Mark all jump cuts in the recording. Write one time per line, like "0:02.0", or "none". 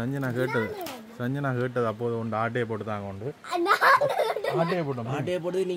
none

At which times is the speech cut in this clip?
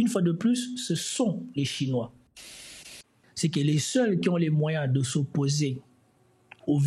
0:02.8

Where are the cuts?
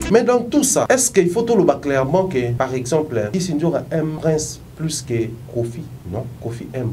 0:00.9
0:02.5
0:03.3
0:04.2
0:06.0

